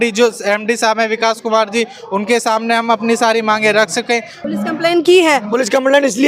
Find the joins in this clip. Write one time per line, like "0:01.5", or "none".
0:04.3